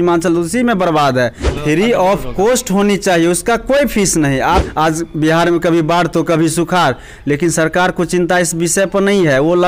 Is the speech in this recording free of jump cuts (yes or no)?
no